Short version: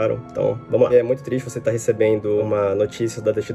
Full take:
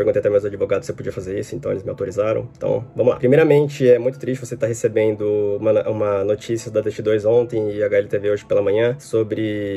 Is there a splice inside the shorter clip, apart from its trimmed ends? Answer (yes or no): yes